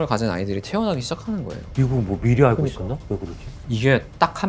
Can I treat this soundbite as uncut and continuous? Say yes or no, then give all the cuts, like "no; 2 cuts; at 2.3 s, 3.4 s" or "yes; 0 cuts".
no; 1 cut; at 1.6 s